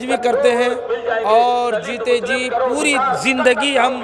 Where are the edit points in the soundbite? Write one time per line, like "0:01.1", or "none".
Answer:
none